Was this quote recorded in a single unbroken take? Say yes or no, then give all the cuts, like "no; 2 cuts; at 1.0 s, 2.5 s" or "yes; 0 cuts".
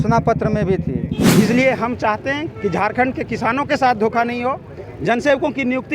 no; 1 cut; at 1.2 s